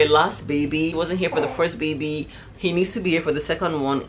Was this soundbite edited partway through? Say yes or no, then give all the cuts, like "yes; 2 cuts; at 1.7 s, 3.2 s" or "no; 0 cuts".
yes; 1 cut; at 1.0 s